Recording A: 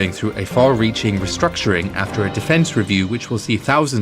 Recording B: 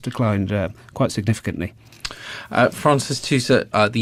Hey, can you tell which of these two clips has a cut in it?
A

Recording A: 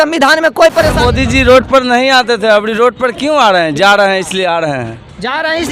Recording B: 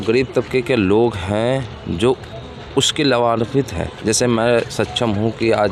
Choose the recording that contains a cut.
A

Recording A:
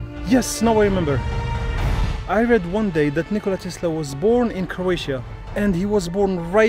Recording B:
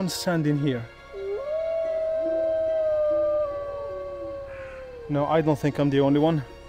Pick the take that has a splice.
A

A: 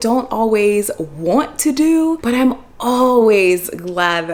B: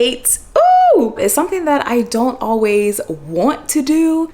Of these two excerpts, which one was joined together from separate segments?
B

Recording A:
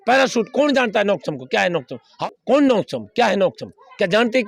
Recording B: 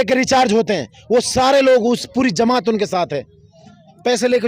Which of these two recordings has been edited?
A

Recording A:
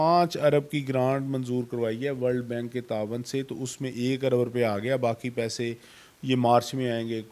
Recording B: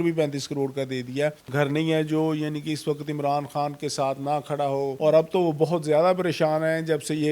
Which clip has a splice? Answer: B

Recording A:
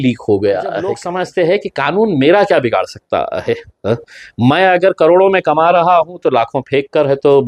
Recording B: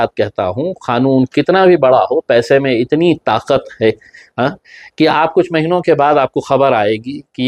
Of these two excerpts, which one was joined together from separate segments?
A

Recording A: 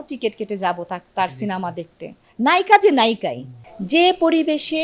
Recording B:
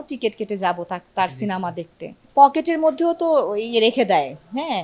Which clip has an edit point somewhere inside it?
A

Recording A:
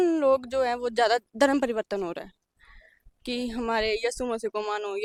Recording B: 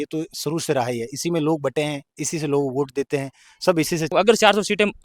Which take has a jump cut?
B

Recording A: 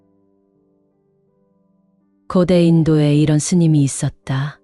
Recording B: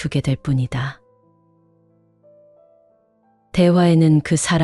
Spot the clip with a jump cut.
B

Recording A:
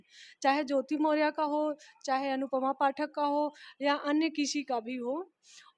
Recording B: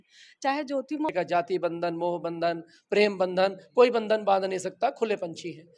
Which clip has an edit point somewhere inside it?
B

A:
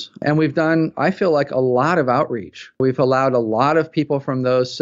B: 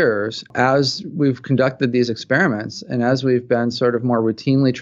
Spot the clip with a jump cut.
A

